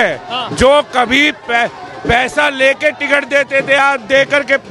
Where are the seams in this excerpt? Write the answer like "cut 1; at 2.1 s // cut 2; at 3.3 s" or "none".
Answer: none